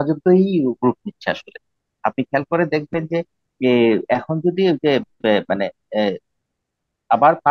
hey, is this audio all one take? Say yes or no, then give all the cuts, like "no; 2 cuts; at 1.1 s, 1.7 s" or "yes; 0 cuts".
yes; 0 cuts